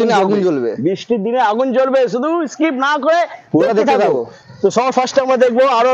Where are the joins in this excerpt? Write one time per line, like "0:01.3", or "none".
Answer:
none